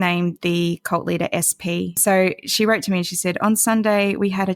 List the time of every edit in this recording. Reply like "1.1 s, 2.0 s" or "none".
1.9 s